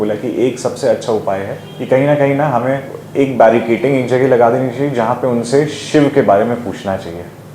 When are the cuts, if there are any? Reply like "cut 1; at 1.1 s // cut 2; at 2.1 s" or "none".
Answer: none

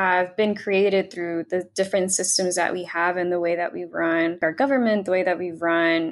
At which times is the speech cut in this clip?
cut 1; at 4.4 s

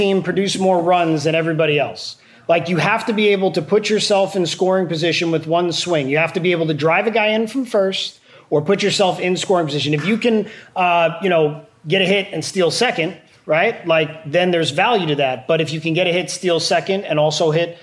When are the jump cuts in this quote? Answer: none

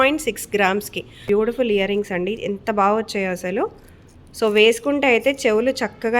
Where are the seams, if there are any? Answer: cut 1; at 1.2 s

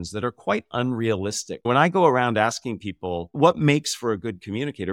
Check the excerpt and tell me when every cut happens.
cut 1; at 1.5 s

